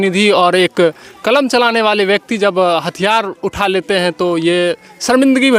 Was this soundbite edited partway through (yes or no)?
no